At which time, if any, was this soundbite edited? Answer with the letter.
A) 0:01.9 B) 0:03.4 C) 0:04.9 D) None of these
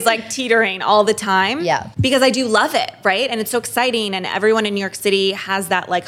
A